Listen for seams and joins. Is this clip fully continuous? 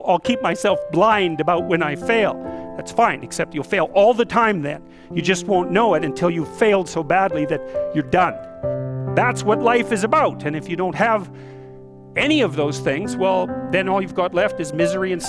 no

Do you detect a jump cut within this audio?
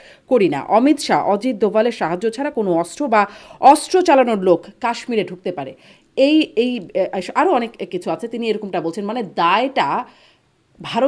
no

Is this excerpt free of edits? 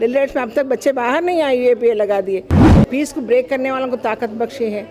no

